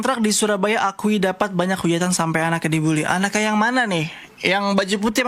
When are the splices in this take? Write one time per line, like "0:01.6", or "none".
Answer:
none